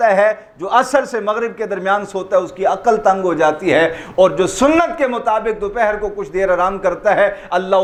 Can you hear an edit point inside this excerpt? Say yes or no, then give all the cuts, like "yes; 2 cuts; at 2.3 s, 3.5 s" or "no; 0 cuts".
no; 0 cuts